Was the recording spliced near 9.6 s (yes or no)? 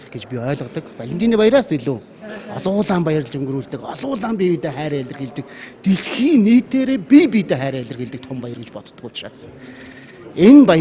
no